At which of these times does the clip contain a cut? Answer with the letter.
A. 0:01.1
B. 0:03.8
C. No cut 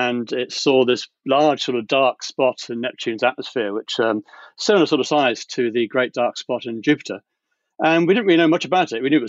C